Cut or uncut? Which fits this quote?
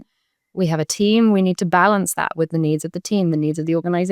uncut